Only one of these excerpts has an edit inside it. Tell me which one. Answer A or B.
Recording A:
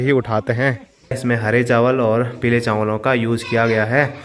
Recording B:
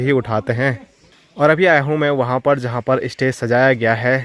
A